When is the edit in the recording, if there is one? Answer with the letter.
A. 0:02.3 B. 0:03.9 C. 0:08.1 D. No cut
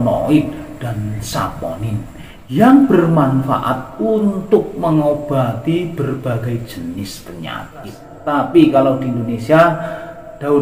C